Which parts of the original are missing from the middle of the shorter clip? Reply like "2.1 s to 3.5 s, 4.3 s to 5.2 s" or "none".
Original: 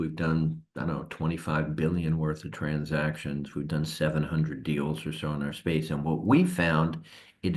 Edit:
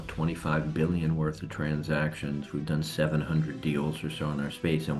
none